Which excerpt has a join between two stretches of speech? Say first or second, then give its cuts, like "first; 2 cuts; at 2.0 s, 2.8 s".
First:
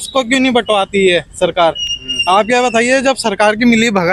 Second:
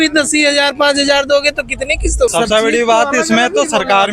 second; 1 cut; at 2.3 s